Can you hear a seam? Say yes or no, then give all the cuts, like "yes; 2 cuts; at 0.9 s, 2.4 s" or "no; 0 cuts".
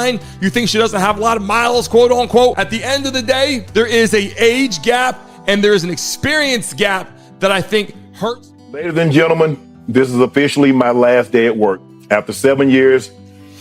yes; 1 cut; at 8.5 s